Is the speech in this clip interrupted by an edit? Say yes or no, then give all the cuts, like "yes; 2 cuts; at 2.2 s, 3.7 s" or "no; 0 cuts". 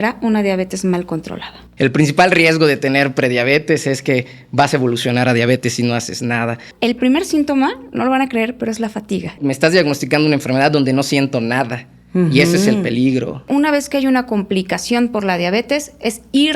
yes; 4 cuts; at 1.6 s, 6.7 s, 9.3 s, 13.5 s